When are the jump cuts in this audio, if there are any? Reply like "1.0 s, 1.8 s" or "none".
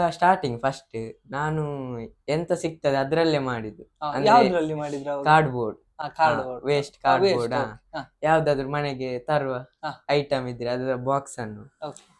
none